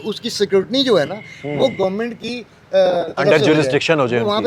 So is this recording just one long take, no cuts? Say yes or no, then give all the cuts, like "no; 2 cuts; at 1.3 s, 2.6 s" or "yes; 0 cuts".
yes; 0 cuts